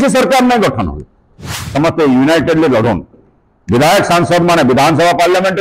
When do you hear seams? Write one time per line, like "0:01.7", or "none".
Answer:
0:01.6